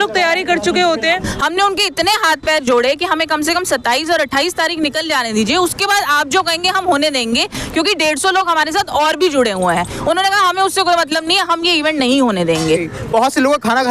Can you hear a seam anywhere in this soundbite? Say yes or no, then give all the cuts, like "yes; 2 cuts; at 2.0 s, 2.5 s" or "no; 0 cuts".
yes; 2 cuts; at 1.1 s, 12.9 s